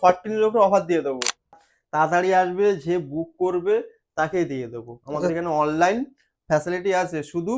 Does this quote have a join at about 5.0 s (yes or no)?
no